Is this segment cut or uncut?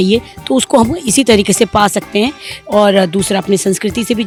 uncut